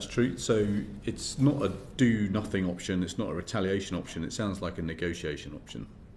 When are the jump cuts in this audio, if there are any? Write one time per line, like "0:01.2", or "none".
none